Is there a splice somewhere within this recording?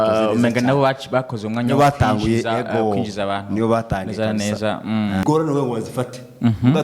yes; 1 cut; at 5.2 s

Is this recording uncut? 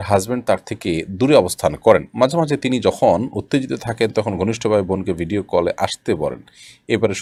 yes; 0 cuts

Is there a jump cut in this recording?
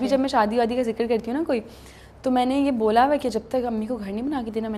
no; 0 cuts

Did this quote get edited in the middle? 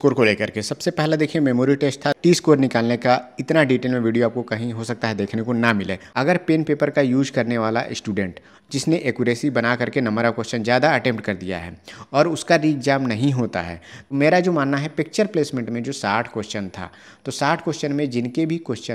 yes; 3 cuts; at 2.2 s, 6.0 s, 14.1 s

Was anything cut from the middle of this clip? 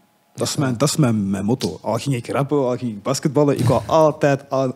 no; 0 cuts

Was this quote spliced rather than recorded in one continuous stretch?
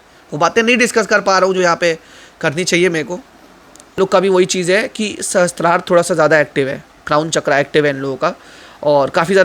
yes; 1 cut; at 3.9 s

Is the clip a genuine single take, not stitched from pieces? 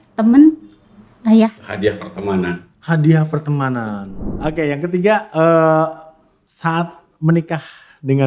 no; 2 cuts; at 1.7 s, 4.0 s

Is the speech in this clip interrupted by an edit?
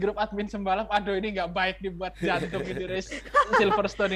no; 0 cuts

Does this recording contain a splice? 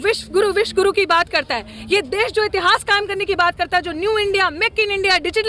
no; 0 cuts

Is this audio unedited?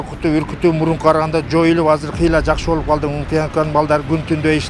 yes; 0 cuts

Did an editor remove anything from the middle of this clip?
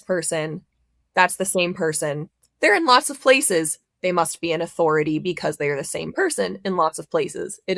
no; 0 cuts

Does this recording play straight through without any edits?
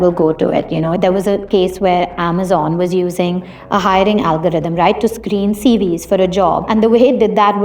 no; 2 cuts; at 0.9 s, 6.6 s

